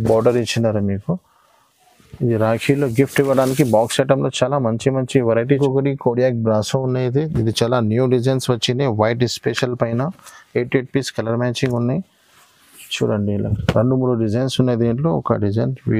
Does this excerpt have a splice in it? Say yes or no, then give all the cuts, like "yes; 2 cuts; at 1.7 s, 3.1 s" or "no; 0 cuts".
yes; 1 cut; at 5.6 s